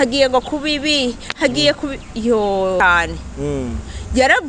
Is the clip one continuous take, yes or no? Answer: no